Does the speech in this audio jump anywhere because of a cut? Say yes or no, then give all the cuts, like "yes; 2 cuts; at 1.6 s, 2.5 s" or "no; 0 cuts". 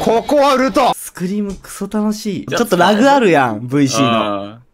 yes; 2 cuts; at 1.1 s, 2.5 s